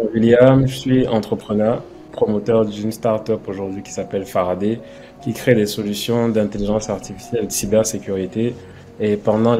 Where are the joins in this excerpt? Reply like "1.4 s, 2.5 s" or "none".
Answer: 2.0 s